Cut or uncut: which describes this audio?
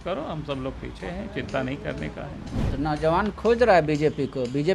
uncut